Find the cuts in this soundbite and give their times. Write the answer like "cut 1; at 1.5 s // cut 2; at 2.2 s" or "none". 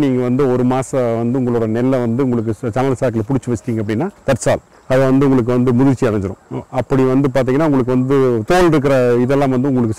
cut 1; at 8.5 s